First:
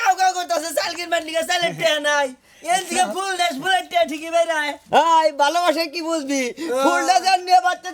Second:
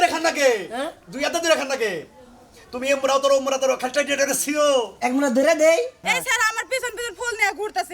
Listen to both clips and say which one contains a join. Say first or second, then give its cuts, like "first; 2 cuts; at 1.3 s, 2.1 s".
second; 1 cut; at 6.0 s